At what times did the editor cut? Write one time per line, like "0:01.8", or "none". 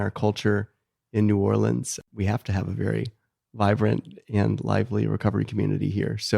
0:01.9